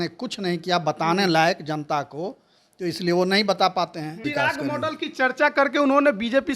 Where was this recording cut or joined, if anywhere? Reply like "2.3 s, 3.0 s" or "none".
4.2 s